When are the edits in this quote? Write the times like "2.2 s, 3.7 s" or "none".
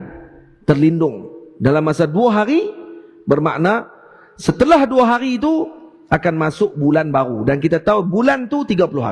none